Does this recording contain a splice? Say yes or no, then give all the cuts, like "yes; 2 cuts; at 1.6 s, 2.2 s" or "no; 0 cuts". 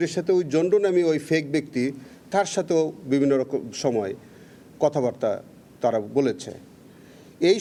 no; 0 cuts